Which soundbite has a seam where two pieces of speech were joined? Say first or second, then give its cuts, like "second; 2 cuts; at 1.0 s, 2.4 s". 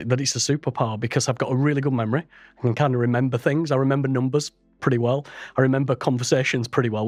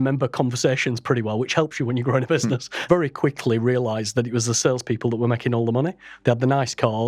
second; 1 cut; at 2.9 s